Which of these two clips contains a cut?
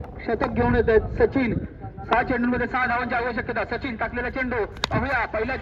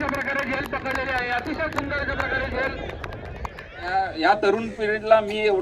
second; 1 cut; at 3.8 s

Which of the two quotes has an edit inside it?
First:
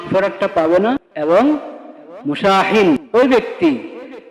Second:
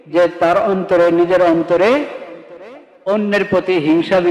first; 2 cuts; at 1.1 s, 3.0 s

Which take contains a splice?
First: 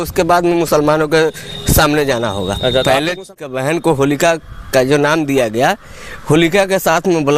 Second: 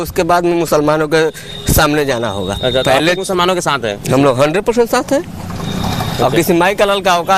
first; 1 cut; at 3.6 s

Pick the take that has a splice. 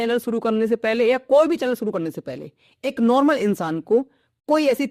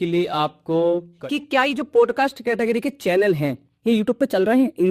second; 1 cut; at 1.1 s

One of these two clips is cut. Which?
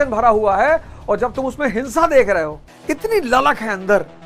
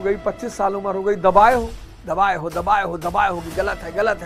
first; 1 cut; at 2.7 s

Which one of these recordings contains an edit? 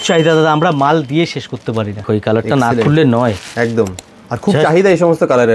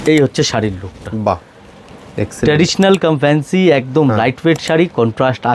first; 1 cut; at 2.0 s

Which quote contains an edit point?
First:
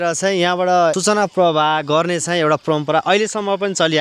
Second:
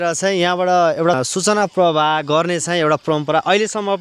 first; 1 cut; at 0.9 s

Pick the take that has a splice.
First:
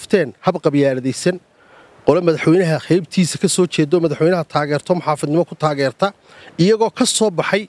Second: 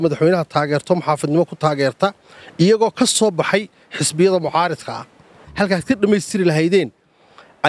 second; 1 cut; at 5.4 s

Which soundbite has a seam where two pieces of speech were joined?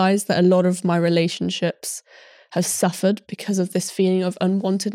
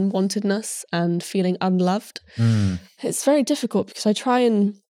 second; 1 cut; at 2.8 s

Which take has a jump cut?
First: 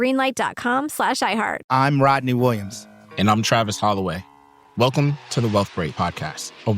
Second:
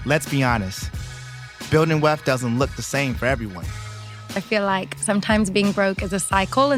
first; 1 cut; at 1.7 s

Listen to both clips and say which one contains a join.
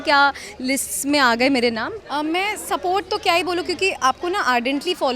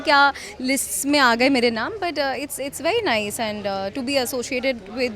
first; 1 cut; at 1.9 s

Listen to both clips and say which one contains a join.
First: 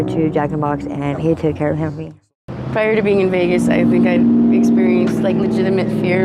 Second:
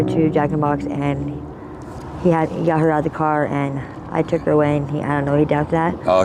first; 2 cuts; at 1.2 s, 2.1 s

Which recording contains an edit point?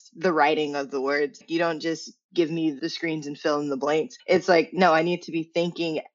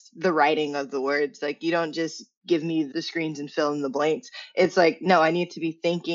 first; 2 cuts; at 1.4 s, 4.2 s

